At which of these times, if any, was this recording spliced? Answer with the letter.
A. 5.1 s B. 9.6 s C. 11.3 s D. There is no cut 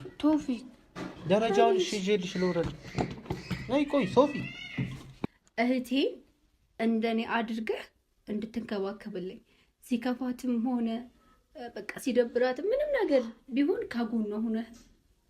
A